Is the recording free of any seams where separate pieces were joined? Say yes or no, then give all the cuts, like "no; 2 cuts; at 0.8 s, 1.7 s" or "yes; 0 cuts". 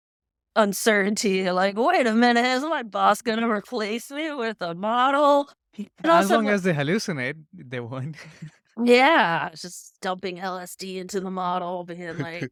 yes; 0 cuts